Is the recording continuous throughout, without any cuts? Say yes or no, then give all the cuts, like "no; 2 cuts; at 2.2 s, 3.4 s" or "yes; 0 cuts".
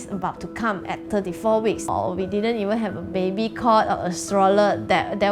no; 2 cuts; at 1.0 s, 1.9 s